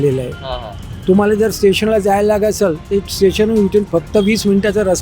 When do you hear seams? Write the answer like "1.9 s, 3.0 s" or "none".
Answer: none